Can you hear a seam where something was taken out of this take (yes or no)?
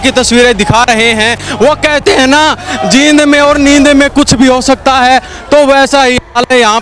no